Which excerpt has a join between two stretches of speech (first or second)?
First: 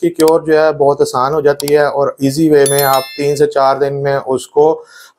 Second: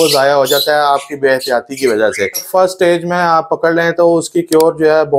second